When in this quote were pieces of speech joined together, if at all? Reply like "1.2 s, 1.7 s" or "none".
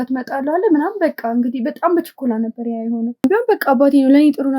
3.2 s